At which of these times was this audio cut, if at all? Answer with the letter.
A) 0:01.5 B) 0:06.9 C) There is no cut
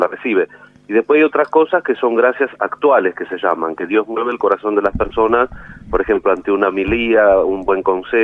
A